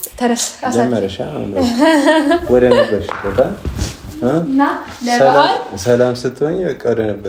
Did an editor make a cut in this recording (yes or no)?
no